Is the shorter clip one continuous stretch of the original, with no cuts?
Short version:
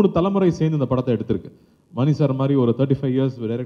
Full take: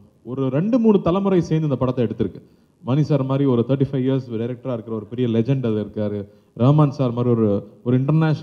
yes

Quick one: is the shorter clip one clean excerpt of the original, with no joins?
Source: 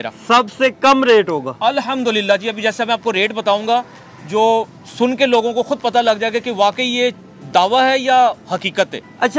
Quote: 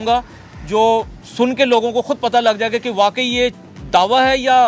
yes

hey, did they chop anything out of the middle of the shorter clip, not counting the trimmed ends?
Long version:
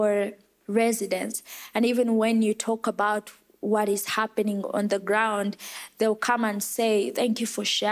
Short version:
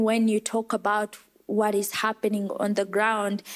no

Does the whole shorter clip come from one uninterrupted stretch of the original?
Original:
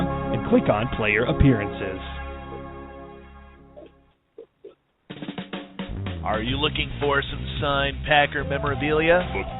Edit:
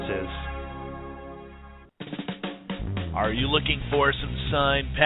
no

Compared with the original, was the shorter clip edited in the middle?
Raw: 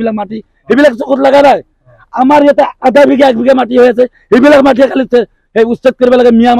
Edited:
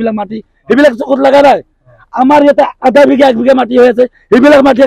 no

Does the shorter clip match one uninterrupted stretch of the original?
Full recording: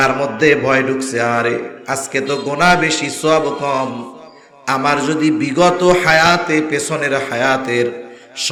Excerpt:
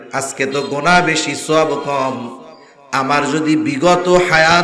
yes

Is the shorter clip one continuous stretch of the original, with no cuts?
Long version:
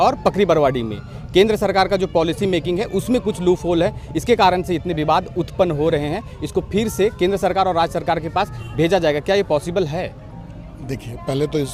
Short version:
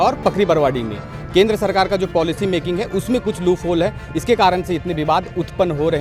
yes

